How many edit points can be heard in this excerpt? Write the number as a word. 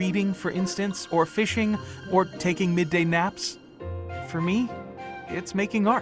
zero